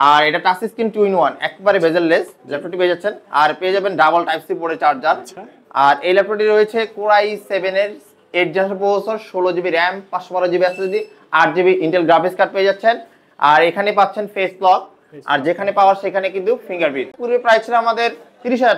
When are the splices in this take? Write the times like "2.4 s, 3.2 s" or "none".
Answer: 17.2 s